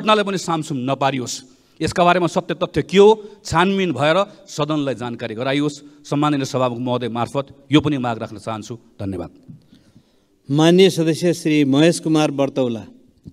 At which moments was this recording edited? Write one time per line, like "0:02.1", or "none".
none